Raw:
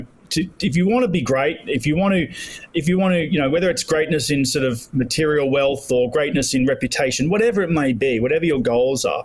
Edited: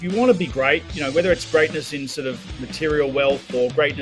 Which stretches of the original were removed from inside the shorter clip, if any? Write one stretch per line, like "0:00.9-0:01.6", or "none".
0:01.7-0:03.3